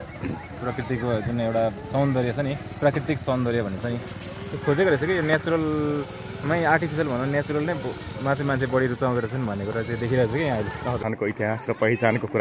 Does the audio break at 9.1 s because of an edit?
no; 1 cut; at 11.0 s

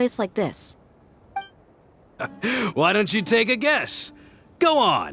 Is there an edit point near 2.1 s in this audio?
yes; 1 cut; at 2.1 s

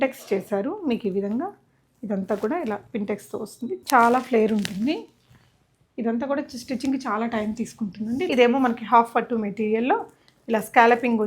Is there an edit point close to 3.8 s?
yes; 2 cuts; at 3.8 s, 8.3 s

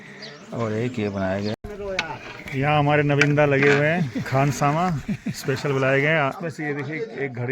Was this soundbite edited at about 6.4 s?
yes; 2 cuts; at 1.6 s, 6.4 s

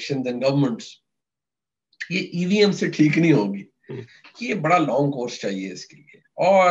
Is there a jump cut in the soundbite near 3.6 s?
no; 0 cuts

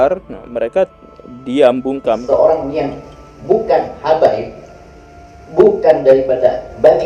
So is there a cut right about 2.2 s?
yes; 1 cut; at 2.2 s

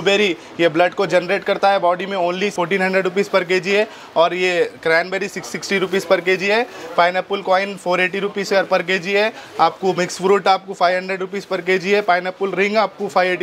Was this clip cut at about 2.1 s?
no; 0 cuts

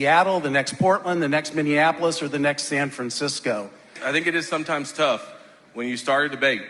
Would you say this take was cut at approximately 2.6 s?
no; 1 cut; at 3.9 s

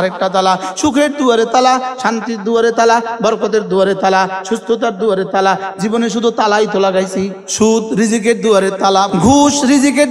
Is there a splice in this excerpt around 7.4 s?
yes; 2 cuts; at 7.4 s, 9.1 s

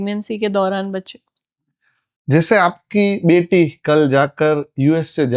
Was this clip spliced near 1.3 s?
no; 0 cuts

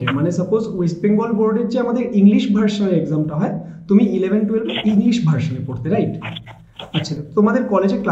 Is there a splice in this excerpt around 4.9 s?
no; 1 cut; at 7.2 s

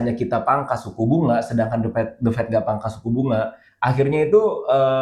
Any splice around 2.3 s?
no; 0 cuts

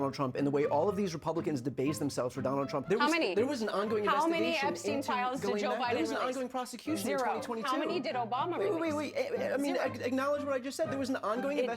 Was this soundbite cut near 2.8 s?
yes; 1 cut; at 2.8 s

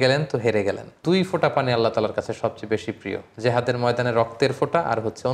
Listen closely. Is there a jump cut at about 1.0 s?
yes; 1 cut; at 1.0 s

